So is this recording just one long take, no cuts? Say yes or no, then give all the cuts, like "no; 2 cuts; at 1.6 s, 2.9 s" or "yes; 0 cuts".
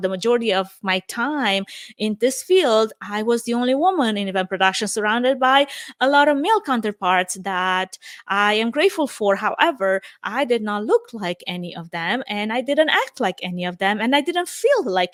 yes; 0 cuts